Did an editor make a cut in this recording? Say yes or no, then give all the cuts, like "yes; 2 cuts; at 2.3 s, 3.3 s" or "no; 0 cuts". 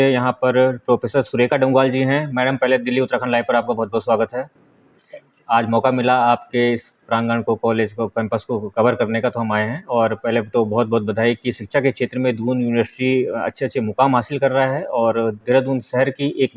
no; 0 cuts